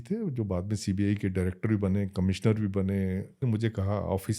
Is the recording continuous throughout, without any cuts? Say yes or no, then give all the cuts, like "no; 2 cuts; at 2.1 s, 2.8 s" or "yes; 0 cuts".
no; 1 cut; at 3.4 s